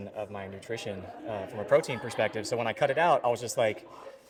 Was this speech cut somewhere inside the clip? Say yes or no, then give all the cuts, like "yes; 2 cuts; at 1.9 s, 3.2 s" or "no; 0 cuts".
no; 0 cuts